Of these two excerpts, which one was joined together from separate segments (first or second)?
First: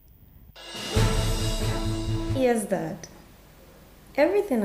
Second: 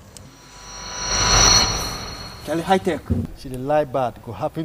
first